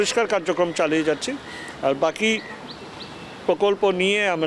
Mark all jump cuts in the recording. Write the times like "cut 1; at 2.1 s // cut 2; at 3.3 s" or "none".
none